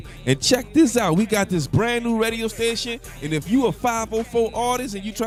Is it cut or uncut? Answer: uncut